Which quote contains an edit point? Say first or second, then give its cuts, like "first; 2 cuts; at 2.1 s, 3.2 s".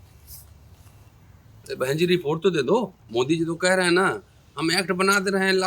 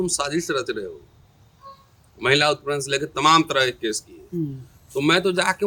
first; 1 cut; at 3.0 s